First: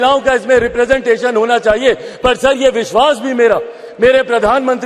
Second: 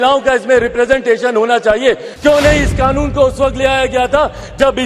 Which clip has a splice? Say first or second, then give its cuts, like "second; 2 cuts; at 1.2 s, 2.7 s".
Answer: second; 1 cut; at 2.1 s